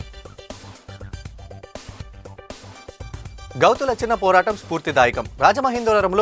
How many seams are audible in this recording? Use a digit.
0